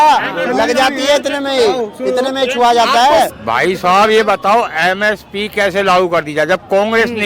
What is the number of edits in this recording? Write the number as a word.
one